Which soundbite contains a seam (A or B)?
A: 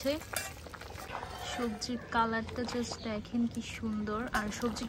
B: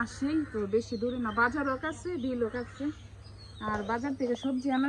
A